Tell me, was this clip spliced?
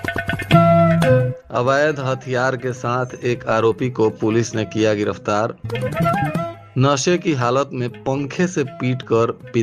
yes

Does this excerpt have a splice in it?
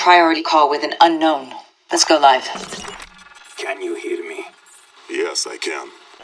no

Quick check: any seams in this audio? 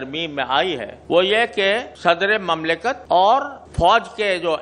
yes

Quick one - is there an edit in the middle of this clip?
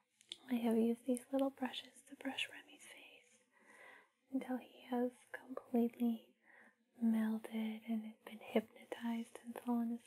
no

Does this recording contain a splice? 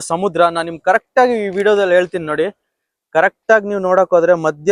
no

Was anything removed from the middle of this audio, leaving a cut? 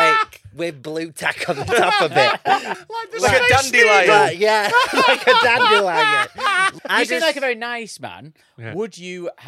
yes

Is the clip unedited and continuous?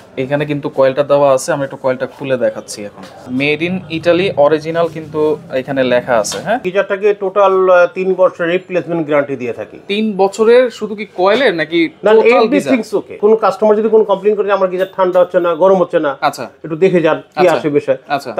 no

